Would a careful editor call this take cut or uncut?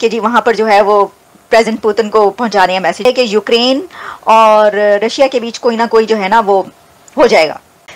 cut